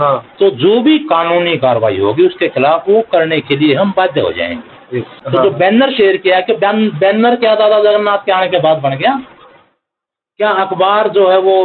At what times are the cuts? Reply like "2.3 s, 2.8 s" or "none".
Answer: 5.1 s